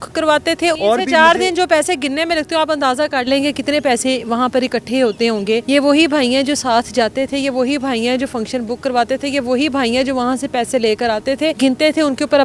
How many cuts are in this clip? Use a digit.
3